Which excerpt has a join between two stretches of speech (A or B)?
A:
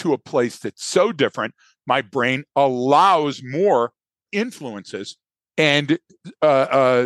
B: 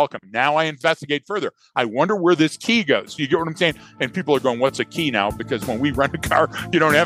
A